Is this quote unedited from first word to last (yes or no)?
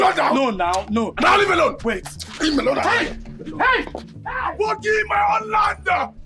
yes